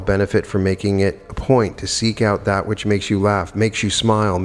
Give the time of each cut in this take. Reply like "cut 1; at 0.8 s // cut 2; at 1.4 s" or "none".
none